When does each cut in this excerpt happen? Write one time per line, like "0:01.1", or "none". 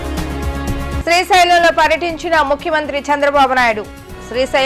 0:01.0